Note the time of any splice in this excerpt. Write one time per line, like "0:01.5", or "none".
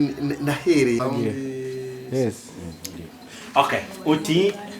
0:01.0